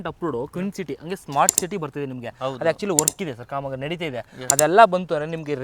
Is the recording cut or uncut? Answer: uncut